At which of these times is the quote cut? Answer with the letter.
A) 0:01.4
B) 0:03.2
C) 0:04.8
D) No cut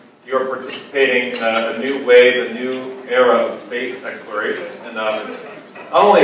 B